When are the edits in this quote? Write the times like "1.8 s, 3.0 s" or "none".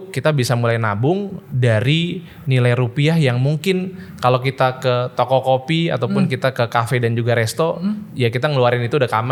none